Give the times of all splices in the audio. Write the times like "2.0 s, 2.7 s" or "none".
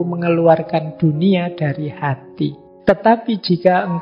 2.7 s